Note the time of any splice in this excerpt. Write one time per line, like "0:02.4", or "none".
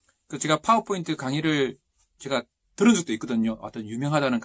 none